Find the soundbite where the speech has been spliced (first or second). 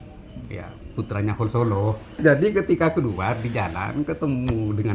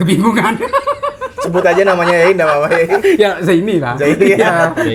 first